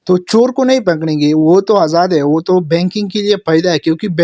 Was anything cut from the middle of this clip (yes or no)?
no